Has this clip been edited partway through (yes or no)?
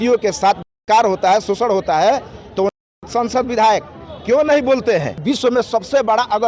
yes